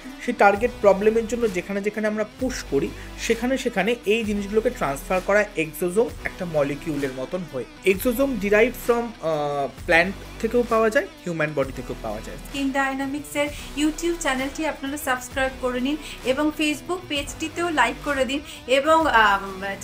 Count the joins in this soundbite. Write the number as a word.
two